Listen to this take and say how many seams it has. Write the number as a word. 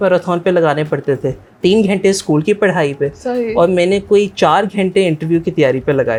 zero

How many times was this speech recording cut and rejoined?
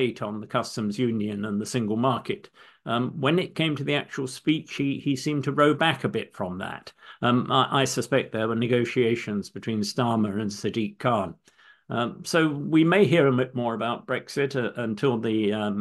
zero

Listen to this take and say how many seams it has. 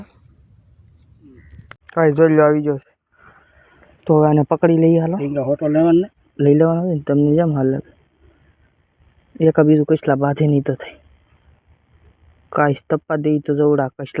one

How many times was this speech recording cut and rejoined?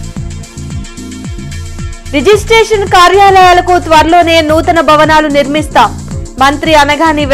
zero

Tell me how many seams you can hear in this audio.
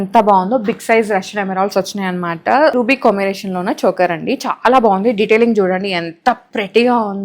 one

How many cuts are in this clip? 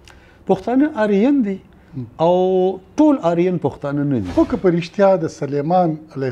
one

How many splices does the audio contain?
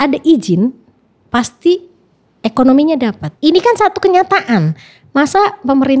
one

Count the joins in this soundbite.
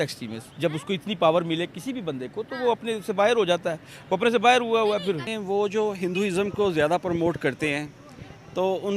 one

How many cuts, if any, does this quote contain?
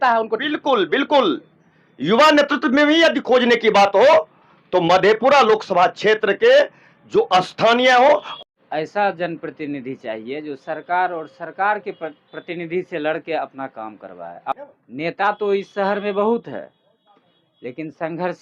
two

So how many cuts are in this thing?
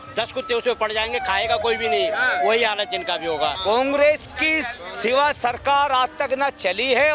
one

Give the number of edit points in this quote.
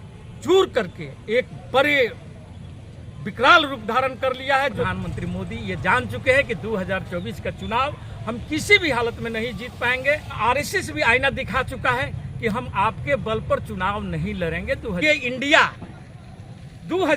three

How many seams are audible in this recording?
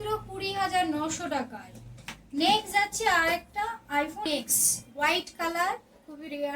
one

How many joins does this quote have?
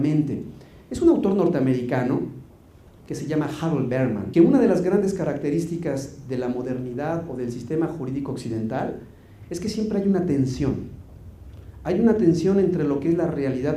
zero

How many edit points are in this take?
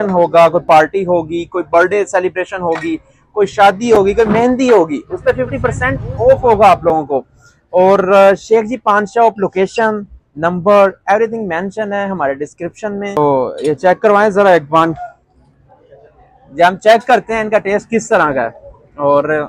one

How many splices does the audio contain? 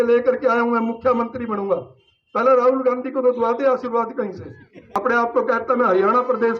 one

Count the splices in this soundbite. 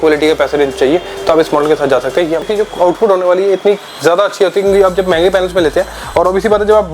one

